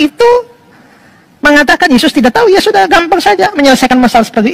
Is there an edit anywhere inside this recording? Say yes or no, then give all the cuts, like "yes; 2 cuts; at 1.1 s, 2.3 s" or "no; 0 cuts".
no; 0 cuts